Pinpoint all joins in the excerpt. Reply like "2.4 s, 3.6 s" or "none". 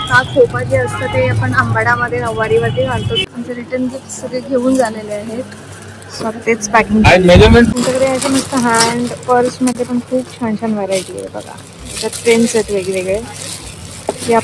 3.2 s, 7.7 s